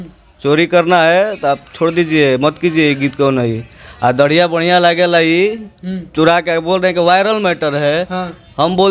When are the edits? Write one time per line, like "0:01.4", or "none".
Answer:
none